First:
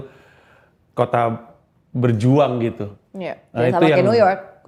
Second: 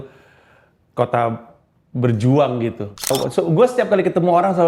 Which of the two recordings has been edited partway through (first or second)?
second